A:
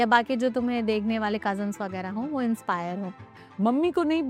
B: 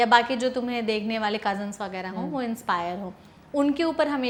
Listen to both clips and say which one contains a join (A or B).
A